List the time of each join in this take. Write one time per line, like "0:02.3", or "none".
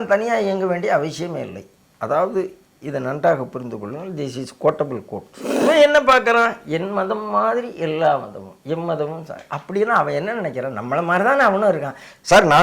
0:05.6